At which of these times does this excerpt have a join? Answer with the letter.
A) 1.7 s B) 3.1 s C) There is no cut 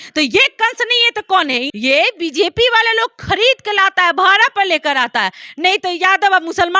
A